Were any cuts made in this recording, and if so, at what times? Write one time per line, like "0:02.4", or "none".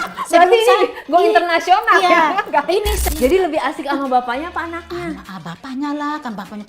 0:03.0